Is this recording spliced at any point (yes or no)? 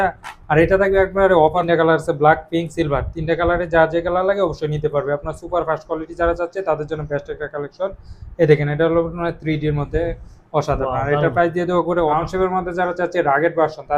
yes